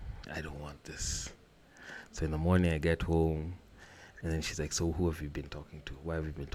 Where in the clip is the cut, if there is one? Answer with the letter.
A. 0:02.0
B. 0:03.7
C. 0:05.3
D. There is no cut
D